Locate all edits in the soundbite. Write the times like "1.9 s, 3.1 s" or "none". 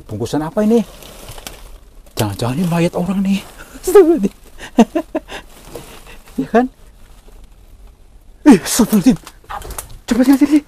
none